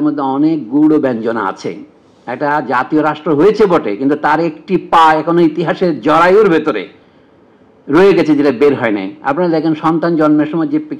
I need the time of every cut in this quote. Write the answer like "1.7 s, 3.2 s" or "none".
none